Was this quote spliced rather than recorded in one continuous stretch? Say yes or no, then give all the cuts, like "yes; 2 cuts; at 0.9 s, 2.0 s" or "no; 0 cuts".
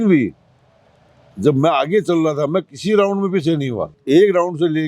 yes; 1 cut; at 3.9 s